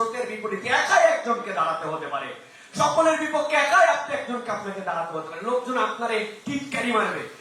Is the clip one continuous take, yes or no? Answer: yes